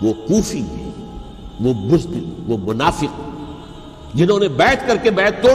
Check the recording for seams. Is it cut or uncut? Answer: uncut